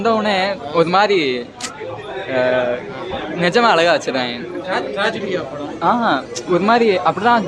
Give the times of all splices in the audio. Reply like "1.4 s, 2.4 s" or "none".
none